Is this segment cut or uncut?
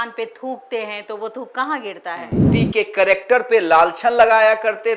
cut